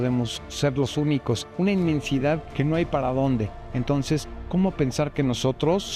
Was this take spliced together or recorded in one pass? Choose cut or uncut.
uncut